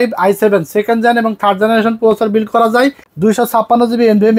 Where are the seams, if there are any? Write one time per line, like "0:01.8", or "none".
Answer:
0:03.1